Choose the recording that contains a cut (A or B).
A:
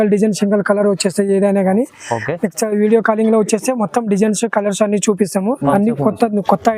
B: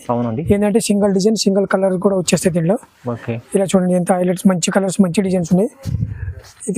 A